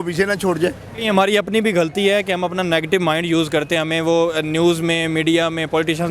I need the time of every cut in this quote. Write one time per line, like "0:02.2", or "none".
0:01.0